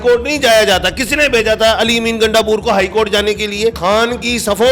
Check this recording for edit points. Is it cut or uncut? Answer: cut